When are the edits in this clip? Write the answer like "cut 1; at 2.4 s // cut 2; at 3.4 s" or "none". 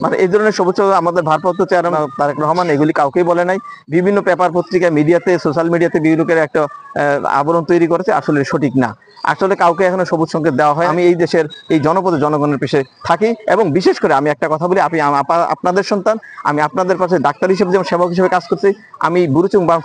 cut 1; at 1.9 s // cut 2; at 10.9 s